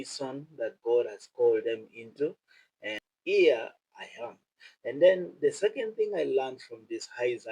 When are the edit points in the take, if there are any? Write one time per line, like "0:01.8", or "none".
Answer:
0:03.1

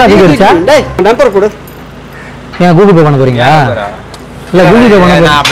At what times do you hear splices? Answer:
0:01.0

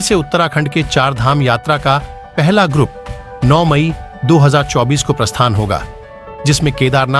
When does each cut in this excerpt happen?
none

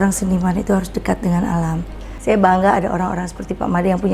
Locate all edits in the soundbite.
0:02.1

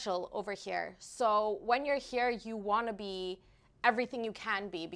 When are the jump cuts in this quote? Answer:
none

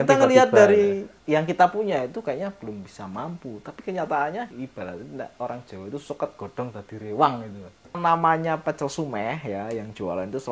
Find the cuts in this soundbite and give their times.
0:01.1
0:04.5
0:08.0

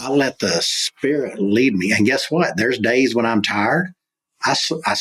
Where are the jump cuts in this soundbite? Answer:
none

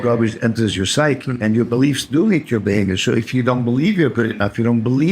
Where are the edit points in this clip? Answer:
0:01.3

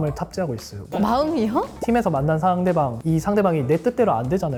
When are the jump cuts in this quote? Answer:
none

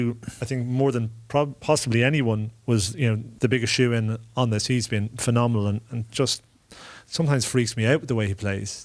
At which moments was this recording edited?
0:03.3

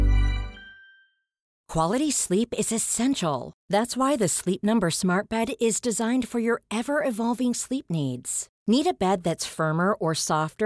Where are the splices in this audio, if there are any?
0:01.5

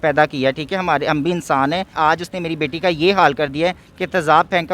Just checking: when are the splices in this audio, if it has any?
0:01.9

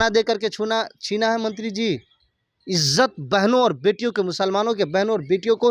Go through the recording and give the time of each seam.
none

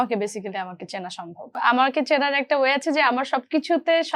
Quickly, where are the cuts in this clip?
0:01.6

